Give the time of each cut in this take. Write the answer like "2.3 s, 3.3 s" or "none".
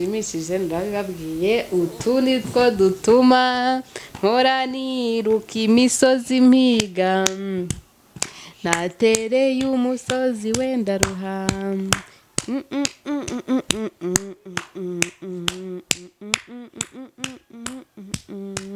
none